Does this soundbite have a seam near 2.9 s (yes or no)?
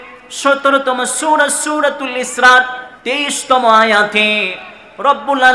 yes